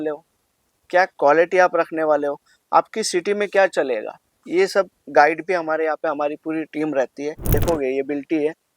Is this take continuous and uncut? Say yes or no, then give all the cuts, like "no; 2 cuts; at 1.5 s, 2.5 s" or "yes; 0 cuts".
no; 1 cut; at 7.5 s